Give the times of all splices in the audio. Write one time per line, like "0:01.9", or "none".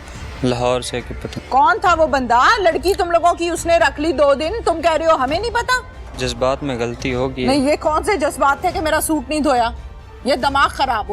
0:01.3
0:06.1